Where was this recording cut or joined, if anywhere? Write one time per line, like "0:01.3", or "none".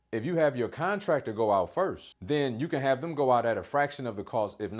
0:02.1